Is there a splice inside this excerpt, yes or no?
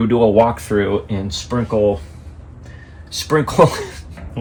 no